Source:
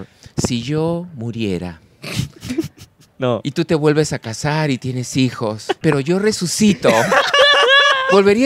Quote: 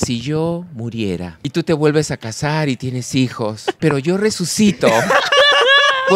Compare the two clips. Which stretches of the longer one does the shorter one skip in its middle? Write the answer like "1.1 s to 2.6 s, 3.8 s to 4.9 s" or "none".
1.9 s to 3.5 s